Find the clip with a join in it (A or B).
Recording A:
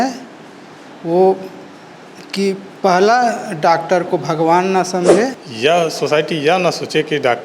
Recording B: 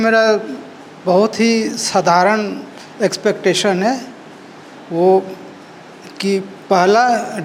A